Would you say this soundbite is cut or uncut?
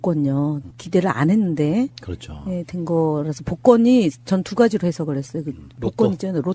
uncut